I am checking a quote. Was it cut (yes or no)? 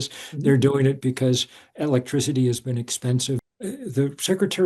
yes